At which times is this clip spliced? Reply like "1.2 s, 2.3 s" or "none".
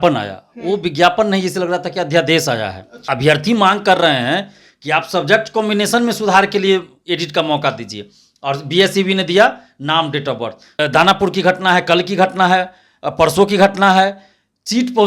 2.9 s, 10.6 s